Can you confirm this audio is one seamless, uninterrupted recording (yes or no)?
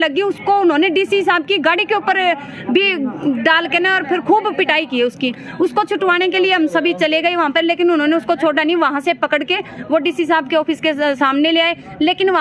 yes